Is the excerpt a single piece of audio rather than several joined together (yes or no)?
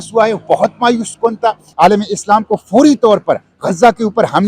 no